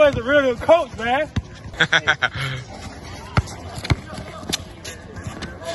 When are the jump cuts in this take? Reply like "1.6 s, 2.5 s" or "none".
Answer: 1.8 s